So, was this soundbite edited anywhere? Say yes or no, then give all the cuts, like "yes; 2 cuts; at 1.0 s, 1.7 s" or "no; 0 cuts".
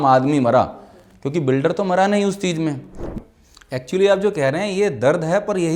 yes; 1 cut; at 3.0 s